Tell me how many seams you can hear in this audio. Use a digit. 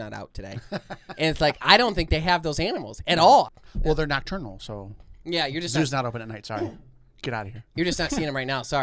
1